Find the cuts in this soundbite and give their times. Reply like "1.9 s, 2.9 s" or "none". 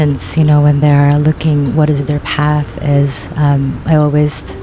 none